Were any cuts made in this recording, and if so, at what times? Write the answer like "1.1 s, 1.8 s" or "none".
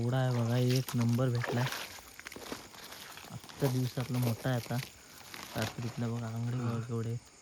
none